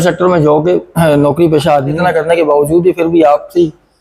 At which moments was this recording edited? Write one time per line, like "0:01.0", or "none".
0:02.0

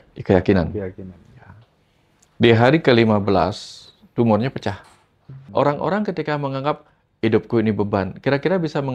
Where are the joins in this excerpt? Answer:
0:05.3

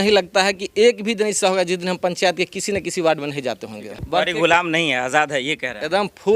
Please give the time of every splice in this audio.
0:03.9

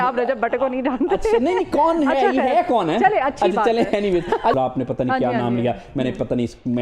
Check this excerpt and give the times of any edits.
0:04.5

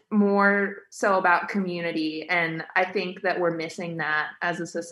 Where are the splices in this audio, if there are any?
none

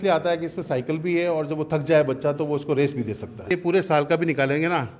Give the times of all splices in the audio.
0:03.5

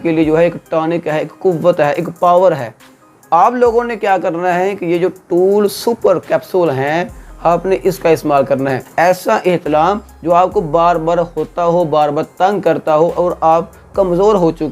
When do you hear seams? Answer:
0:08.8

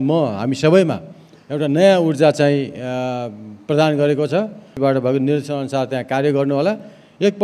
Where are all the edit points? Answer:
0:04.7

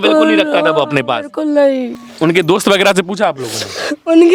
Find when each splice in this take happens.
0:02.0

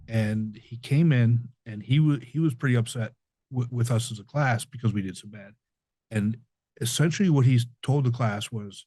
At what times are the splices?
none

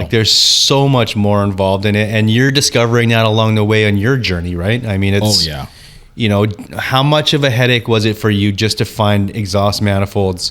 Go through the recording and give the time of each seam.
0:02.5
0:04.2

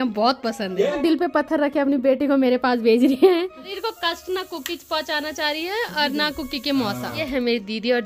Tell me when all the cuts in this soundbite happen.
0:01.0
0:03.3
0:07.2

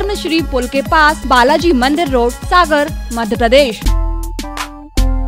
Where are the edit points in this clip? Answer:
0:01.2
0:02.4
0:03.8

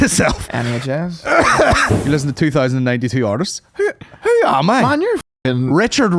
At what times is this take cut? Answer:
0:01.9

